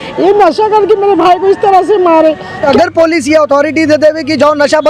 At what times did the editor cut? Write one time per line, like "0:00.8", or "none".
0:02.7